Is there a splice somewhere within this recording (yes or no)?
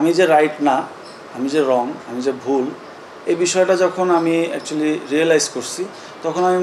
no